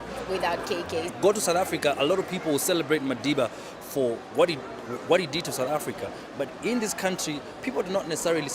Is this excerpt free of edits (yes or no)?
yes